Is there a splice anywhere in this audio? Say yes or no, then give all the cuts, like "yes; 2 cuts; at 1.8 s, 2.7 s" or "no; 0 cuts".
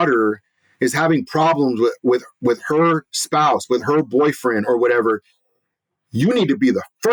no; 0 cuts